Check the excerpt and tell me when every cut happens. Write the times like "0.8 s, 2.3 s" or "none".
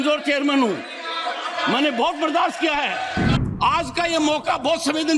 3.3 s